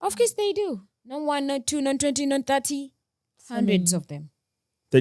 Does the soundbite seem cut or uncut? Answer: uncut